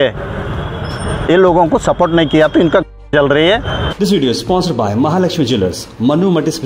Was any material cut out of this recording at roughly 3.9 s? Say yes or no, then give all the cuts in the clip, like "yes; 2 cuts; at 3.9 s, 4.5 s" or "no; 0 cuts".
yes; 1 cut; at 3.9 s